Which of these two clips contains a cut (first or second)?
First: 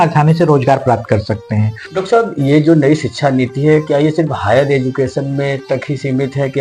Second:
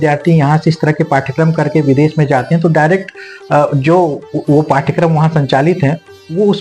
first